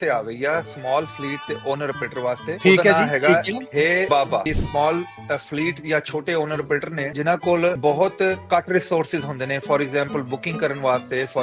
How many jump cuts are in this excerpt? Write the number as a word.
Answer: four